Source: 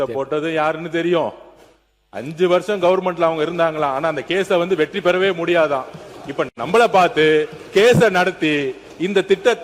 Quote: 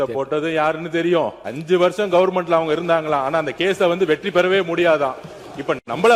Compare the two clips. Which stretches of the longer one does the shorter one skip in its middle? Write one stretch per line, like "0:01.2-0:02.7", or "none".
0:01.5-0:02.2